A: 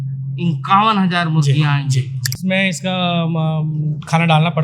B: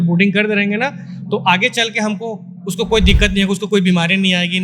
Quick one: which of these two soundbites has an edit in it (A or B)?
A